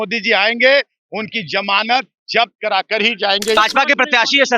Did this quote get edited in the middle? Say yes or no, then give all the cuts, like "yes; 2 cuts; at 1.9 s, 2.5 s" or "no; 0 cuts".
yes; 1 cut; at 3.6 s